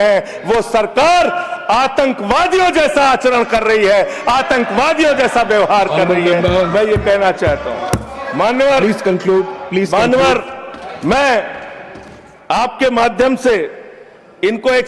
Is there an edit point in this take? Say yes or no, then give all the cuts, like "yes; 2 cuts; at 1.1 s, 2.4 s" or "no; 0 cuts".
no; 0 cuts